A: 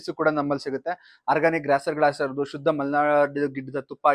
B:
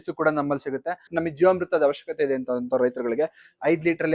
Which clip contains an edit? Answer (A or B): B